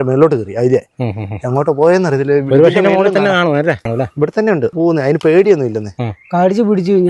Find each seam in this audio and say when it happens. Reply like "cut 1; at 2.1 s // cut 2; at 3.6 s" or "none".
cut 1; at 3.9 s // cut 2; at 4.7 s // cut 3; at 6.0 s